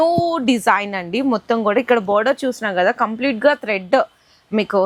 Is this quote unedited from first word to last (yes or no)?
yes